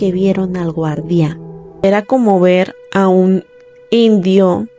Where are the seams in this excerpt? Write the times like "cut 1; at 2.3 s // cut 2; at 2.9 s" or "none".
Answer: cut 1; at 1.8 s